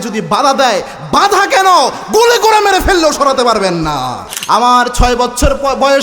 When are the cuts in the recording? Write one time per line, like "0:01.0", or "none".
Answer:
0:04.3